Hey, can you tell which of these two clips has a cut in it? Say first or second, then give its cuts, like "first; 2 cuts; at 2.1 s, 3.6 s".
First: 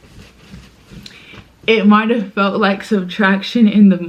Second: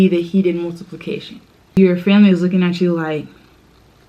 second; 1 cut; at 1.7 s